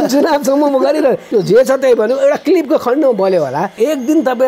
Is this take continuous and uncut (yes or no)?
no